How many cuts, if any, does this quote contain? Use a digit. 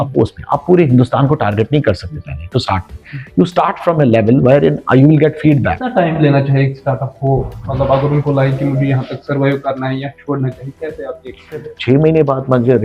2